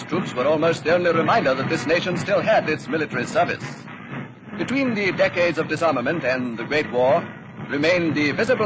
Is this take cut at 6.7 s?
no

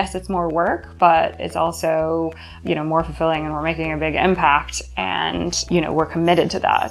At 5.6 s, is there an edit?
yes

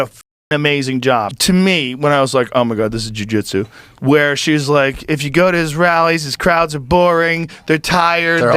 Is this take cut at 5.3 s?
no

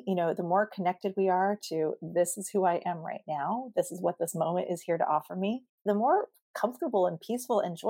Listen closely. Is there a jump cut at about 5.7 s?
yes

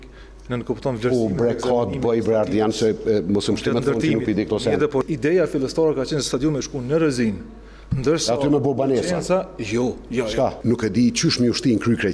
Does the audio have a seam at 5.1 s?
yes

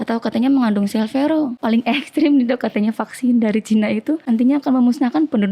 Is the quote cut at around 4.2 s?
yes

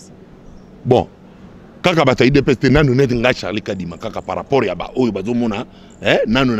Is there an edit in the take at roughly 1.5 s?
no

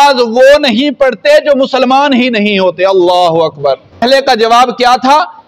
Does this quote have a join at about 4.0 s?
yes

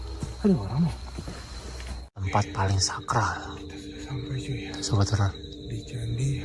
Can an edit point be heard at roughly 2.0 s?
yes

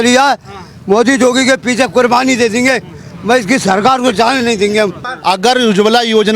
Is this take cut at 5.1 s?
yes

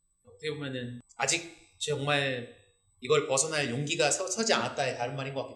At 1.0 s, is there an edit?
yes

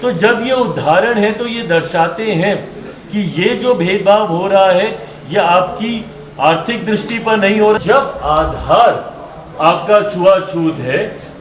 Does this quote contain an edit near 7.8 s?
yes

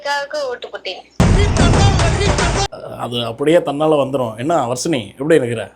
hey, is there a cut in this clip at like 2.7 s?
yes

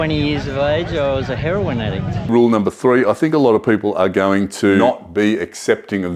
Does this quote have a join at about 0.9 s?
no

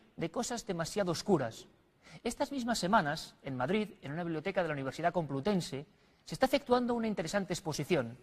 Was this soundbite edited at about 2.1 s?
yes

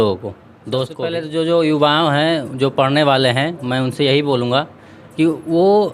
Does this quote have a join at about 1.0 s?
yes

